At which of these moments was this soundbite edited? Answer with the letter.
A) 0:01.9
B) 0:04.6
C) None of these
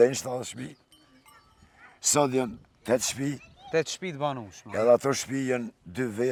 C